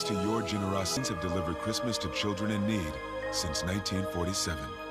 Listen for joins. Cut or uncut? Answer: cut